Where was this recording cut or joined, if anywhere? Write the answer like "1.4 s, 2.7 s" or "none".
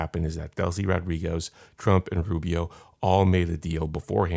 none